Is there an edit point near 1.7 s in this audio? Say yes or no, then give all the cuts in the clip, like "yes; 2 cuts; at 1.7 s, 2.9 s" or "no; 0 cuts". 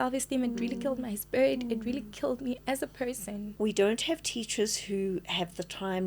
no; 1 cut; at 3.4 s